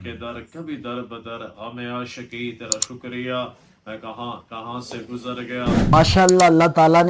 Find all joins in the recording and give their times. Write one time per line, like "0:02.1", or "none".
0:05.9